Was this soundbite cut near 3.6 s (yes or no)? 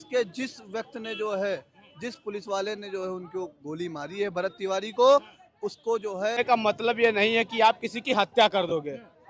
no